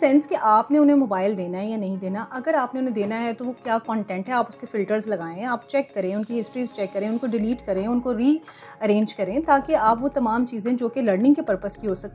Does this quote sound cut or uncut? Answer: uncut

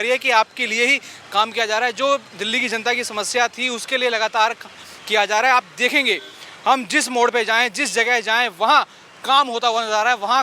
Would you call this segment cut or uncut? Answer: uncut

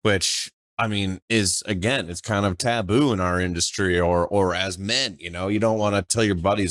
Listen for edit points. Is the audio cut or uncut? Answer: uncut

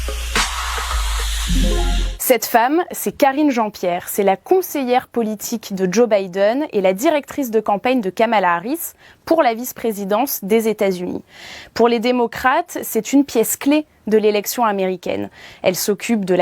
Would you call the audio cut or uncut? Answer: cut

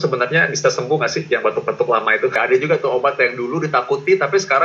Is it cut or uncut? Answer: cut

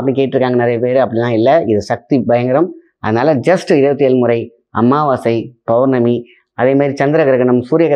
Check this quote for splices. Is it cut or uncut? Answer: uncut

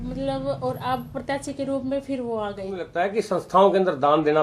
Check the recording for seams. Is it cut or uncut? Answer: cut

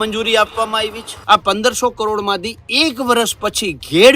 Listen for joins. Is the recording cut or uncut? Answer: cut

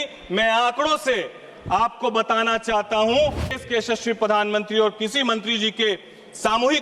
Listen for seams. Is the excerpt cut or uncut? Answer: cut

